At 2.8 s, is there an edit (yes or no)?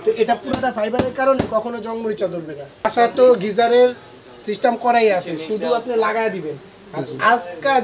yes